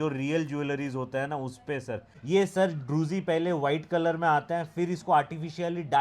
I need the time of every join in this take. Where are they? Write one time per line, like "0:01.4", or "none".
0:02.1

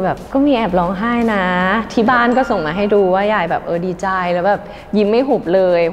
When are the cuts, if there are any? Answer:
none

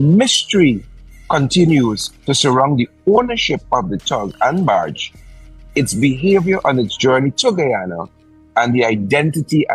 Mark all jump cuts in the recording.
none

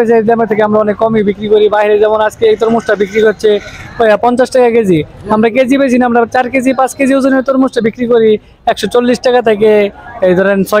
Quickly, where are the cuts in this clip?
none

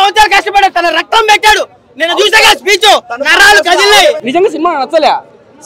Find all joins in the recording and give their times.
0:04.2

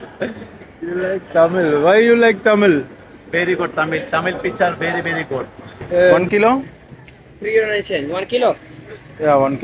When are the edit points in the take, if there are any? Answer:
0:06.2

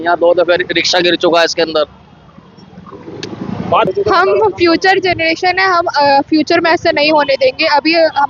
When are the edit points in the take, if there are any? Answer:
0:03.9

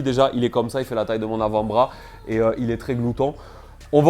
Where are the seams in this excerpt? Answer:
none

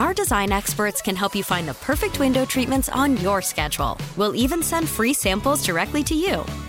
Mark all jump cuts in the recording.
none

